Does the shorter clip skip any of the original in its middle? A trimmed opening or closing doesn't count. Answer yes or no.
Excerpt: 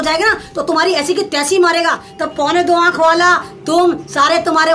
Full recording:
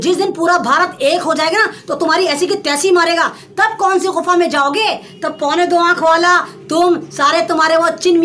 yes